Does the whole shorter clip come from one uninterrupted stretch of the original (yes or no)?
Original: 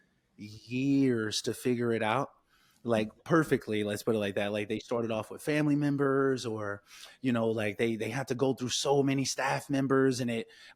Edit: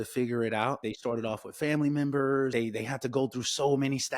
no